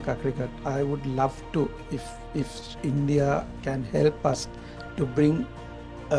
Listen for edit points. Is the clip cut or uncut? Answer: uncut